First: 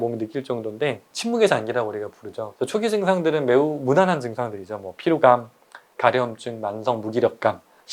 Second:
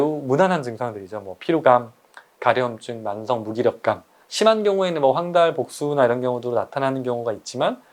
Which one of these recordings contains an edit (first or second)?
first